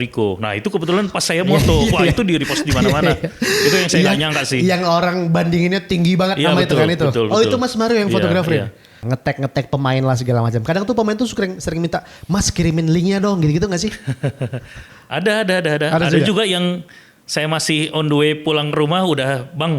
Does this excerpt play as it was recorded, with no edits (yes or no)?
no